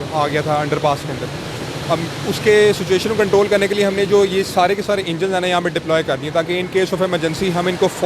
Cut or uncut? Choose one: uncut